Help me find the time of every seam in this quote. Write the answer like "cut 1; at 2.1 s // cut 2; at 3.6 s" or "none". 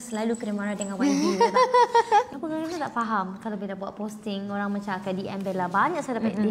cut 1; at 2.3 s